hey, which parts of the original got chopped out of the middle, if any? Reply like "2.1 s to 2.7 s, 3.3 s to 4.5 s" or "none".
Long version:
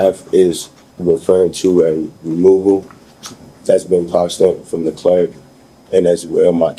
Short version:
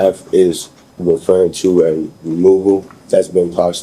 2.9 s to 3.5 s